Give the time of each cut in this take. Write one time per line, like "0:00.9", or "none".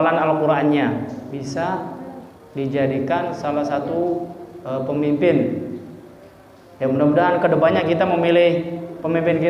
0:01.3